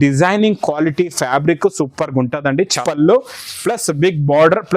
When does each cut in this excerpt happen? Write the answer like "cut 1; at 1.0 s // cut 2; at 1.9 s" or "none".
cut 1; at 2.8 s